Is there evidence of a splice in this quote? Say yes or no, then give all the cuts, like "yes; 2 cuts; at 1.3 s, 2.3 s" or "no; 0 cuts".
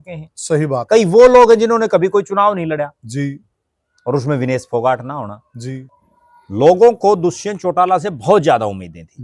yes; 1 cut; at 5.9 s